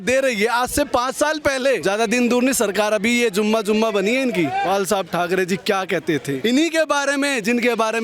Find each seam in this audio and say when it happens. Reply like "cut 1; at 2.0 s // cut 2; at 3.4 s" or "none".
cut 1; at 1.8 s // cut 2; at 4.6 s // cut 3; at 6.4 s